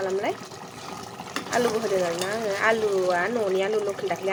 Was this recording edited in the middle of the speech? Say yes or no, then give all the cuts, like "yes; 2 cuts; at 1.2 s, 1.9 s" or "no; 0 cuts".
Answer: no; 0 cuts